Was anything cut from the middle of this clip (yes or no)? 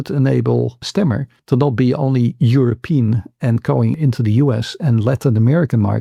no